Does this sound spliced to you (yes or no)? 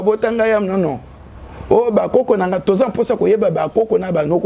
no